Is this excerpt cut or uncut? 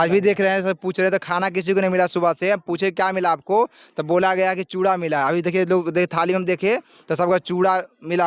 uncut